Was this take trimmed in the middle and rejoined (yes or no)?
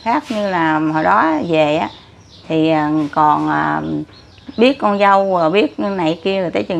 no